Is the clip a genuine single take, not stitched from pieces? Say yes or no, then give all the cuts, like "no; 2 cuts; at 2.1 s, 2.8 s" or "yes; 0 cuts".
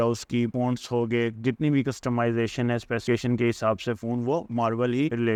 yes; 0 cuts